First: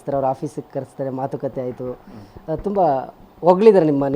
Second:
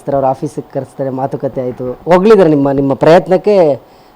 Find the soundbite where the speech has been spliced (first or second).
second